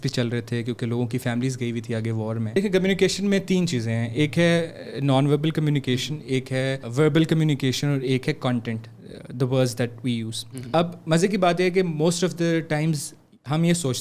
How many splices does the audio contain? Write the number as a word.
two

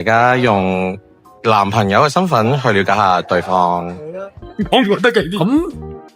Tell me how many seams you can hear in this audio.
one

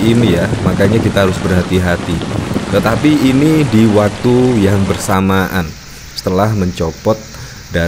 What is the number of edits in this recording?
zero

